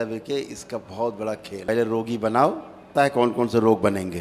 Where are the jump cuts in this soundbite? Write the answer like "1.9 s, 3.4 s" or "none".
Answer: 1.7 s, 2.9 s